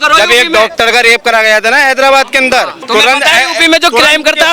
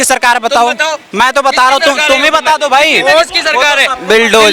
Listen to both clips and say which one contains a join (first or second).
first